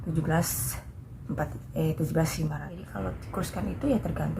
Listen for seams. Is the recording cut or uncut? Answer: cut